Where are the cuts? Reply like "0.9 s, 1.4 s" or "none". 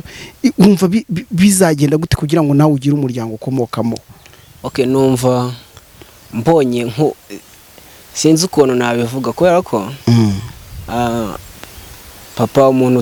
none

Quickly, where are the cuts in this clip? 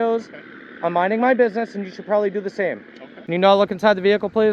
3.4 s

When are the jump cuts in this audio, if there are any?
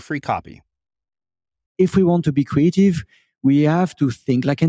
1.7 s

